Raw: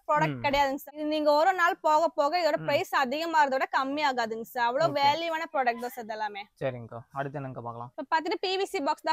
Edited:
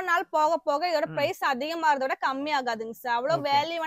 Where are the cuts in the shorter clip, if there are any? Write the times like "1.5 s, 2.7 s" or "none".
none